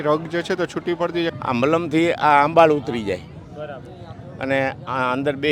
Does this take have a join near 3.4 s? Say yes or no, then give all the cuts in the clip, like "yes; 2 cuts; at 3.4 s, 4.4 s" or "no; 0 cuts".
no; 1 cut; at 1.3 s